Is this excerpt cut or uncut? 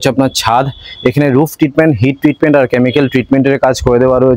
uncut